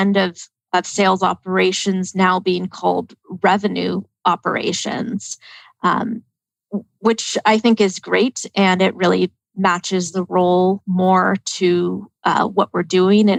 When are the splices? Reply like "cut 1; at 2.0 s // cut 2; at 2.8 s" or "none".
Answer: none

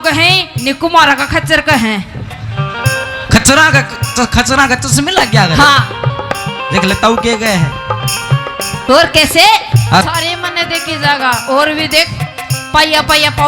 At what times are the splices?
cut 1; at 10.0 s

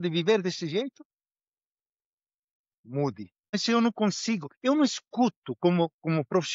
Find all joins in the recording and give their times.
cut 1; at 3.5 s

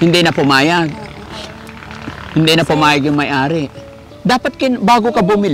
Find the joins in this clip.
none

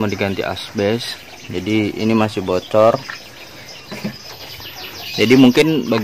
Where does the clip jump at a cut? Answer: cut 1; at 4.4 s

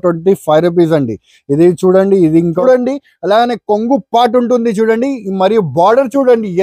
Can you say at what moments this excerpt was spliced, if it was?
cut 1; at 2.6 s

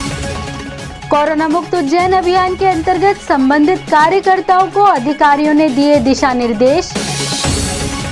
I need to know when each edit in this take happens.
cut 1; at 1.0 s

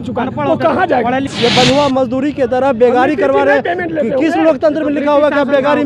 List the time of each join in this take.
cut 1; at 1.3 s

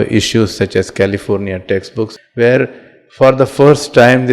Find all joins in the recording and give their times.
cut 1; at 2.1 s

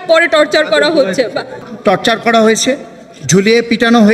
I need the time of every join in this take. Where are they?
cut 1; at 1.7 s

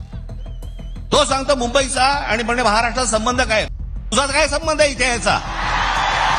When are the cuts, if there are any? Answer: cut 1; at 1.0 s

